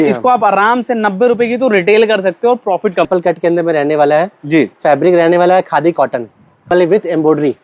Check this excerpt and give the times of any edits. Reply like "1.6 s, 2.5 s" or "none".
3.1 s, 6.7 s